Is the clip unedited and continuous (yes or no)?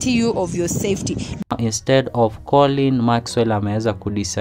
no